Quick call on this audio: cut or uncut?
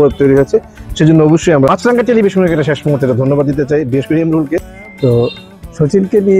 cut